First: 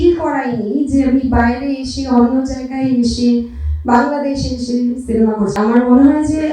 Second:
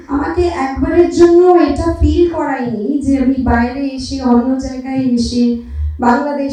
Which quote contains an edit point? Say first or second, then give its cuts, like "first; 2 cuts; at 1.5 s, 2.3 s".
first; 1 cut; at 5.6 s